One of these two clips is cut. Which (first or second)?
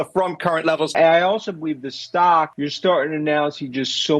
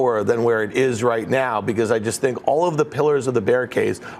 first